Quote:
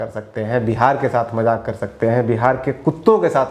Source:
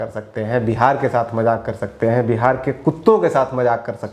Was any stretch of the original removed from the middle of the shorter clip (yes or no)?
no